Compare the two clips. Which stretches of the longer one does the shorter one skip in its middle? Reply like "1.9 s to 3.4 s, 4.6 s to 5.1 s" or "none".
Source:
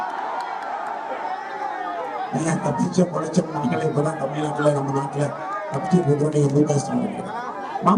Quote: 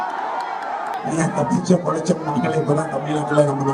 1.0 s to 2.2 s